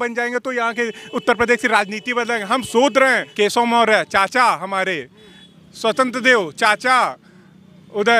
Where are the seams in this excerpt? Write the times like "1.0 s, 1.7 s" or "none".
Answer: 3.3 s